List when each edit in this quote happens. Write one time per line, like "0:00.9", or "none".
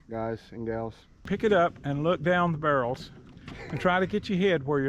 0:01.2